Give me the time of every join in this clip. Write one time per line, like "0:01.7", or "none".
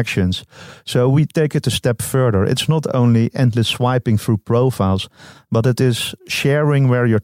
none